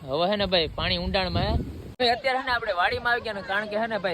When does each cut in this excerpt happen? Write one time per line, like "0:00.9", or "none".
0:01.8